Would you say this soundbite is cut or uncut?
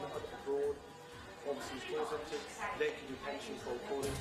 uncut